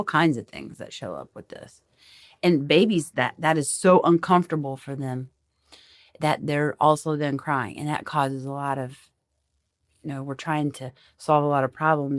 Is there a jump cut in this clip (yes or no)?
no